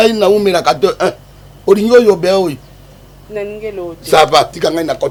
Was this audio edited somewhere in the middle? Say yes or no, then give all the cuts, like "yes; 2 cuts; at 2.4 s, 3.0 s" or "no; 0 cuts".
no; 0 cuts